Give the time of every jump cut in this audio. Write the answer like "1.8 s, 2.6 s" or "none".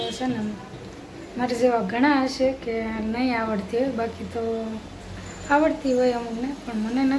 none